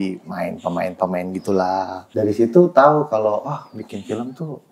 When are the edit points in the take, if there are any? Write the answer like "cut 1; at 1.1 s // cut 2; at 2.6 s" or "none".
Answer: cut 1; at 2.0 s